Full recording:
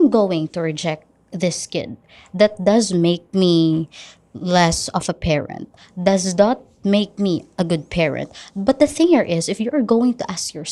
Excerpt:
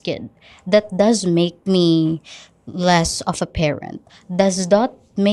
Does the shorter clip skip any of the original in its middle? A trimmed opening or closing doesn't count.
no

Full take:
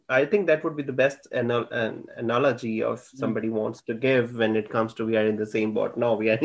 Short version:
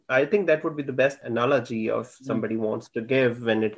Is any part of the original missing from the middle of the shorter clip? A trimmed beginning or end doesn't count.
yes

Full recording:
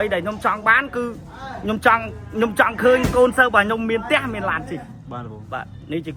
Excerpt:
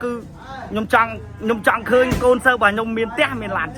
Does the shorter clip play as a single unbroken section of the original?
yes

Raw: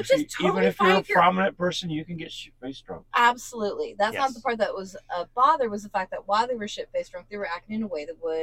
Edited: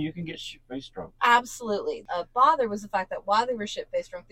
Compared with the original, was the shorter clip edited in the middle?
yes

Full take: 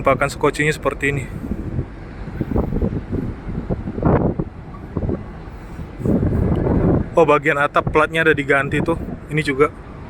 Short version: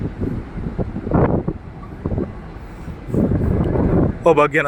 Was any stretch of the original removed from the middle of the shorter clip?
no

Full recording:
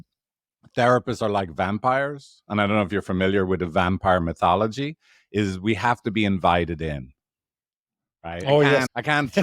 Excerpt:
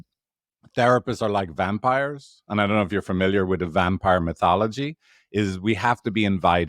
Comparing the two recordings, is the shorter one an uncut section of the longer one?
yes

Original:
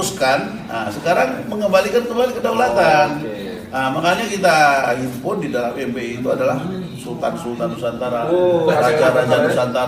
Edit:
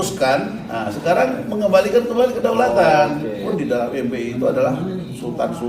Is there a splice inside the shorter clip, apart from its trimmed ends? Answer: yes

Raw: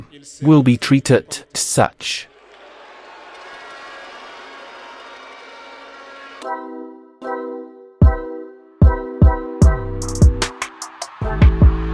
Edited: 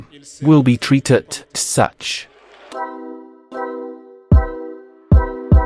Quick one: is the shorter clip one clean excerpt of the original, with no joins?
no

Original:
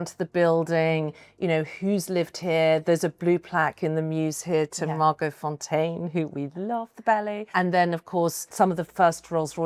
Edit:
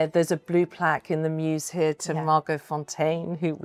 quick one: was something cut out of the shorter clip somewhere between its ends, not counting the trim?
no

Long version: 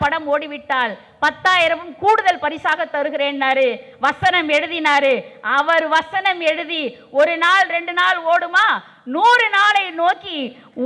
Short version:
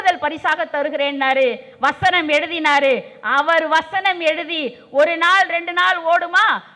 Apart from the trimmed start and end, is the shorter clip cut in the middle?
no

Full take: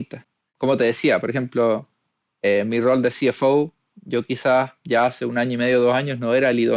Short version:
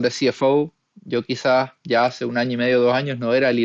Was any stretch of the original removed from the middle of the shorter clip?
no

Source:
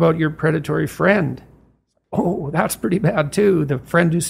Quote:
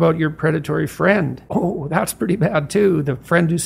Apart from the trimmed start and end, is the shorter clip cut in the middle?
yes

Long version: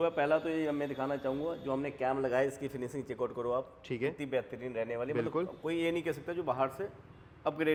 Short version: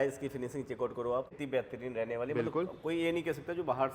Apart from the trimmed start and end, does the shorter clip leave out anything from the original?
yes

